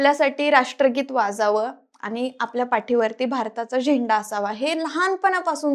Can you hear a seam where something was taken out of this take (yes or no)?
no